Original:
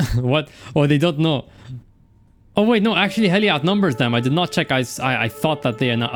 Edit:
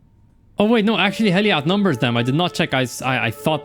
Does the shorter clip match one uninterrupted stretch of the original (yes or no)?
yes